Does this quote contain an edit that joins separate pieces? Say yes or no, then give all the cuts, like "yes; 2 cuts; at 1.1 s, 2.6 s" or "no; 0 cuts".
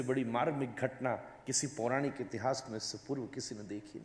no; 0 cuts